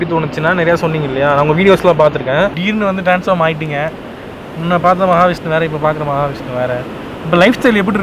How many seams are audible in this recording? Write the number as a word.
one